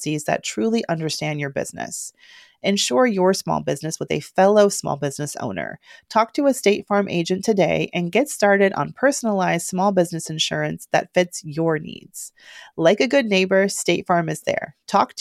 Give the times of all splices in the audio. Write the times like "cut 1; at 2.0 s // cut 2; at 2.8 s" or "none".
none